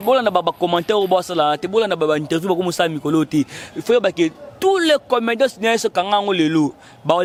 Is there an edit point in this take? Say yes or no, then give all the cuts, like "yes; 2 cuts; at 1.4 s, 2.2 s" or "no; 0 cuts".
no; 0 cuts